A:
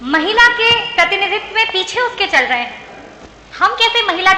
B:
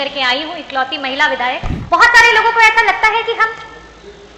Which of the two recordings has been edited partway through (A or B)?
B